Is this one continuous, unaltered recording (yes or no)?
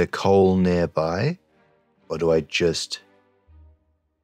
no